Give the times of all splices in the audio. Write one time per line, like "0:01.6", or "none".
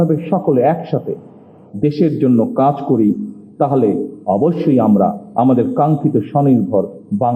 none